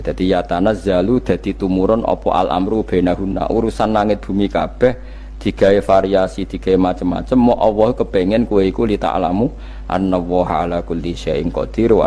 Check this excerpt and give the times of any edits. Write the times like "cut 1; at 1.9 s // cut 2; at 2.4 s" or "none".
none